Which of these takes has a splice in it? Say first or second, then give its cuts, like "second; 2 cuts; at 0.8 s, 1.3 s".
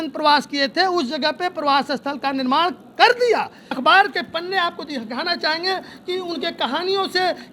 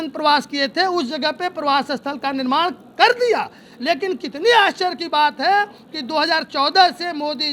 first; 1 cut; at 3.8 s